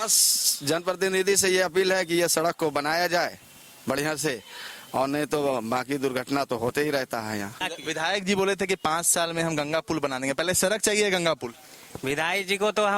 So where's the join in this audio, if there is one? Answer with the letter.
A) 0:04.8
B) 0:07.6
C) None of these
B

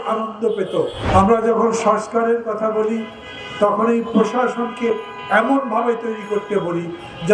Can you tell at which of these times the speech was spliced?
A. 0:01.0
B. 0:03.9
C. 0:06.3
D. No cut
A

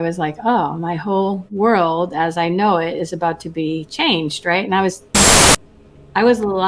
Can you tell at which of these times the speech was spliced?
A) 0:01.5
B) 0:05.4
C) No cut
B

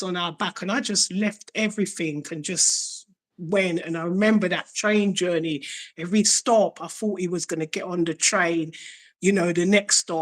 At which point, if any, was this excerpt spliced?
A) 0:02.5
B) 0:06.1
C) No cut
C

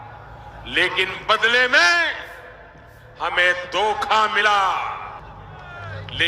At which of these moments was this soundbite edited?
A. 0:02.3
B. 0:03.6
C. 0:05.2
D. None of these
C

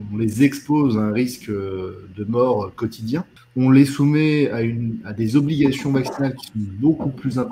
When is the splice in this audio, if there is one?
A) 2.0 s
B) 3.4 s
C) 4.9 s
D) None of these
B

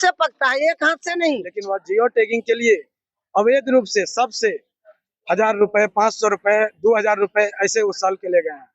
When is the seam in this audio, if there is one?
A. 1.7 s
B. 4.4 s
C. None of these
A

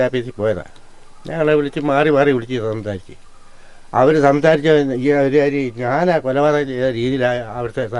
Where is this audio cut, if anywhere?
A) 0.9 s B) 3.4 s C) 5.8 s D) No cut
D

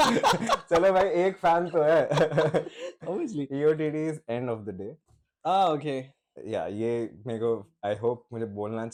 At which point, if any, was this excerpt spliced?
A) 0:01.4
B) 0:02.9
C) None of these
C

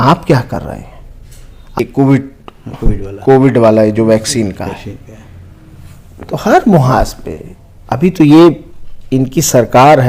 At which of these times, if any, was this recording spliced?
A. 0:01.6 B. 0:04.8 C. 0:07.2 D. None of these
A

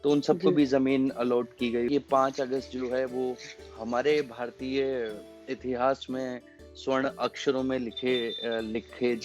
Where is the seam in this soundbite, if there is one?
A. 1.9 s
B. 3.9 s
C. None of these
A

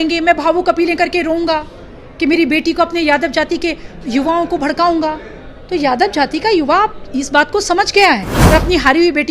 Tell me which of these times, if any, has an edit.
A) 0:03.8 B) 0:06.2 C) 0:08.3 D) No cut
C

